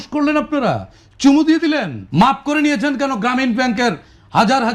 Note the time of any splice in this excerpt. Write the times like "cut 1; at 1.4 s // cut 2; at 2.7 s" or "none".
cut 1; at 2.0 s